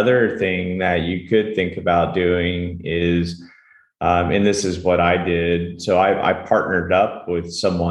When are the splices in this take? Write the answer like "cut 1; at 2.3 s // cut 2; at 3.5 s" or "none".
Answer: none